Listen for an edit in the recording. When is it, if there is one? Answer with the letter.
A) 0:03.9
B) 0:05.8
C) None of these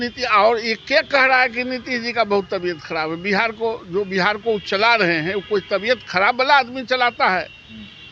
C